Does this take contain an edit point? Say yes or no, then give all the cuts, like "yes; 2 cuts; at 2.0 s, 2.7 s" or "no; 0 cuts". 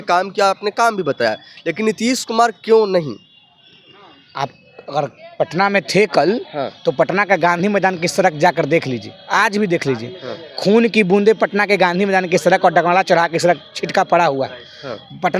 no; 0 cuts